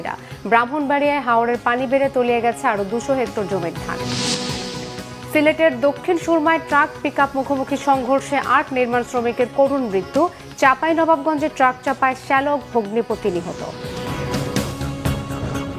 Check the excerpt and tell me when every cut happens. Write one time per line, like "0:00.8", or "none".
0:14.4